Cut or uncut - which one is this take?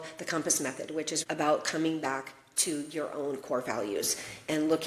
cut